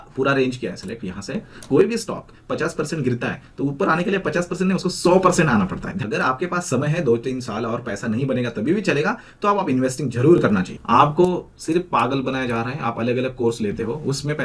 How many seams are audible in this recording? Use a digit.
3